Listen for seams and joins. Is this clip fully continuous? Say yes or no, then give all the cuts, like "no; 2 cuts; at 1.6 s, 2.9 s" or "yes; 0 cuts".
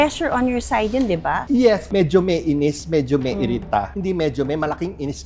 no; 1 cut; at 1.9 s